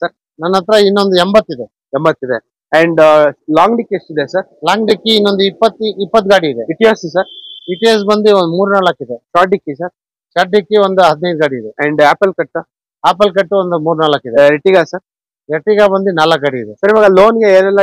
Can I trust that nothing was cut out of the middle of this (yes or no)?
yes